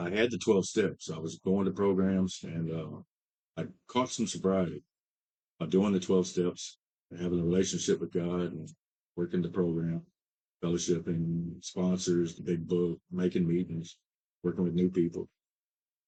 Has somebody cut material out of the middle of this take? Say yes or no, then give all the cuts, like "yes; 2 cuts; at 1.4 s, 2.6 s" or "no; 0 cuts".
no; 0 cuts